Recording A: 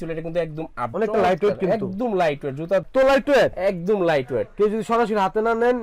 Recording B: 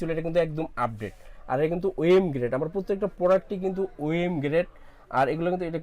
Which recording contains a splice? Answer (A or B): A